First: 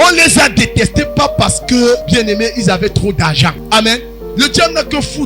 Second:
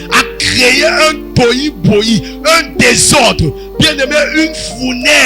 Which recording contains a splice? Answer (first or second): first